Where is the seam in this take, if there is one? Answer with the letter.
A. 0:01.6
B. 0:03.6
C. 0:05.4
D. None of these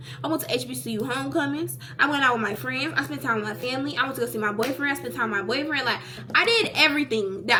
D